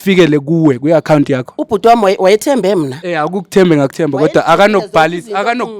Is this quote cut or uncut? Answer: cut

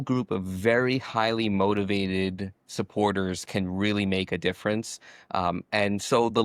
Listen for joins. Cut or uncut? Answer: uncut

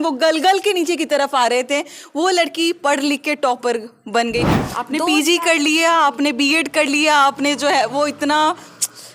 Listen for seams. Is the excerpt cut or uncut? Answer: cut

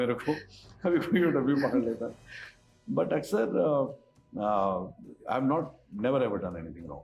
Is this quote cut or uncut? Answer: uncut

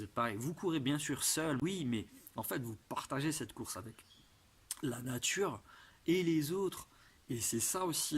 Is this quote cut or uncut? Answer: cut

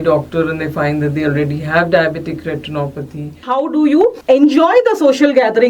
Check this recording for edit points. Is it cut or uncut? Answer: cut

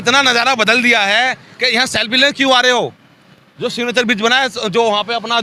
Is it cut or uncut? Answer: uncut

